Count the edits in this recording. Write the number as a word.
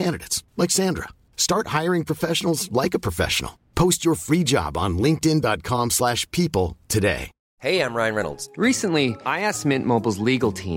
one